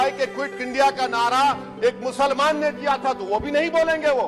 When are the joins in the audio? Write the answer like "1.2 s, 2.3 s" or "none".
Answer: none